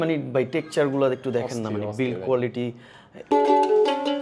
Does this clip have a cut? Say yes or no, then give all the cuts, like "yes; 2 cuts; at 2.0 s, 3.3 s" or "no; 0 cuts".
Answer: yes; 1 cut; at 3.2 s